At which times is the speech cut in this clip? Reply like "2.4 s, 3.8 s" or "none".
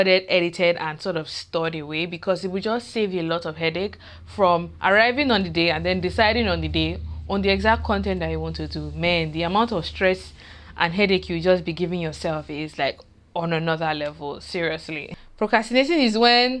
15.0 s